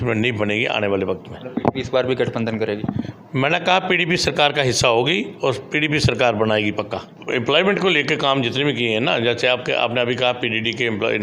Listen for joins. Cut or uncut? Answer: cut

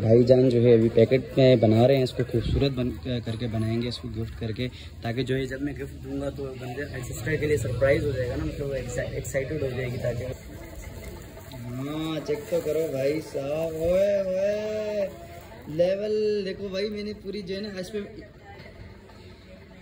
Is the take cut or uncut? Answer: cut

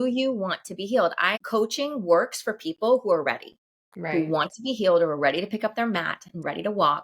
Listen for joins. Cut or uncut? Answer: cut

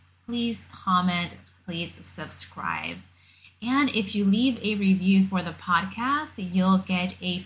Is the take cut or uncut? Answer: uncut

